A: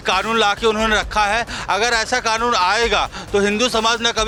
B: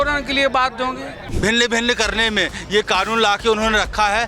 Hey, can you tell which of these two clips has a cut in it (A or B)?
B